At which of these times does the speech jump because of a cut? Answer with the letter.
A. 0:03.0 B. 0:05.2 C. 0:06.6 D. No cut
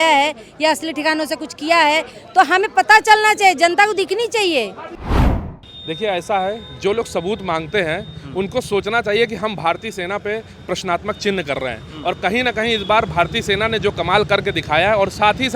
B